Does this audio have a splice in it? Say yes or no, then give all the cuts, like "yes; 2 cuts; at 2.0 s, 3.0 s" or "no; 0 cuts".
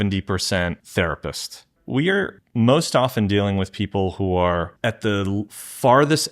yes; 1 cut; at 1.7 s